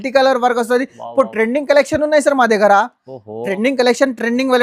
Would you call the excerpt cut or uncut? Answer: uncut